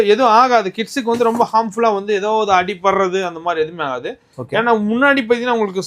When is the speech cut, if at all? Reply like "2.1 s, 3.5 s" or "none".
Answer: none